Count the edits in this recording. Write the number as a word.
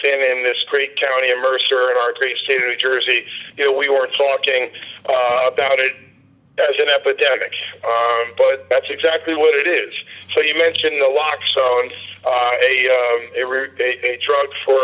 one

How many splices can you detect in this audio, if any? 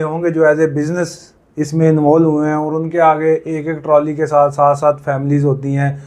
zero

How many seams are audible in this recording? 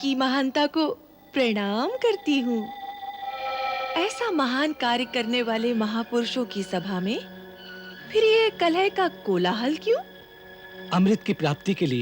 zero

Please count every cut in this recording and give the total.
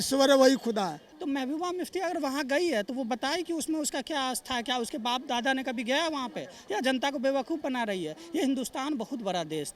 one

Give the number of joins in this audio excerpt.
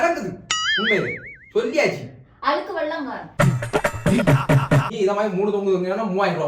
two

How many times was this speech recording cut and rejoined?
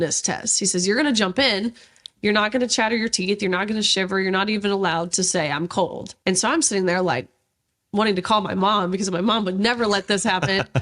one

